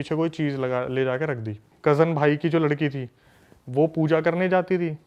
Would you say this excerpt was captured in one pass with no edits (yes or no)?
no